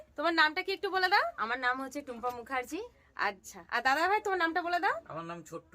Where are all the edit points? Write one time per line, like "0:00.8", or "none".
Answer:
none